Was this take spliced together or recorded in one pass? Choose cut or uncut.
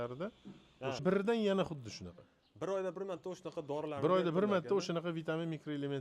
cut